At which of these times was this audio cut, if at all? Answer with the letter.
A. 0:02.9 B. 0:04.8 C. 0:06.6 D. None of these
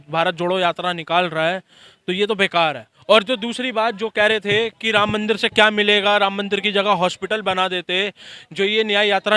A